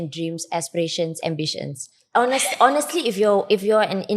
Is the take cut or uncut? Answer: cut